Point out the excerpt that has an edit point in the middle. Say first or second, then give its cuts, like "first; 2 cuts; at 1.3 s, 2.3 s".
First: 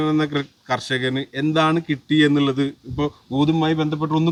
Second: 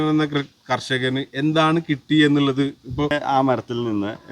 second; 1 cut; at 3.1 s